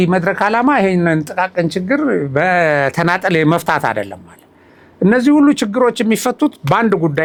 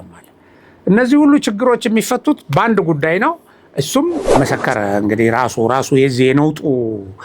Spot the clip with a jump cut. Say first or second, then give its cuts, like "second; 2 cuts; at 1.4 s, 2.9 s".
second; 1 cut; at 4.3 s